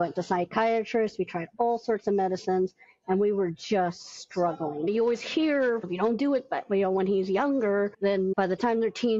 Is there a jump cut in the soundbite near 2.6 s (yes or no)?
no